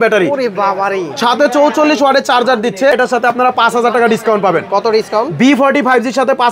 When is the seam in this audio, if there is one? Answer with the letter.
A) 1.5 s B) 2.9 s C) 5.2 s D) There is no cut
B